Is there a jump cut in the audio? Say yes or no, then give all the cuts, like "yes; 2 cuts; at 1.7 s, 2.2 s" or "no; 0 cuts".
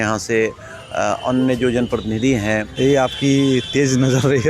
yes; 1 cut; at 2.7 s